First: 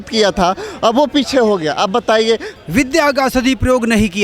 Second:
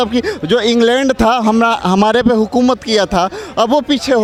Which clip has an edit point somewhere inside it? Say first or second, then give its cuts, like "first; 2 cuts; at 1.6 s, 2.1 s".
first; 1 cut; at 2.5 s